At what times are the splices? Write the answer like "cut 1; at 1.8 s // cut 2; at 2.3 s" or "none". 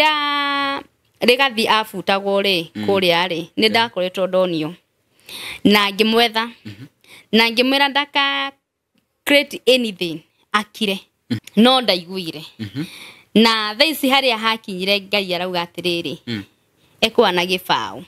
cut 1; at 11.3 s